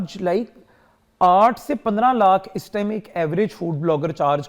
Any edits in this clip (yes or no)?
no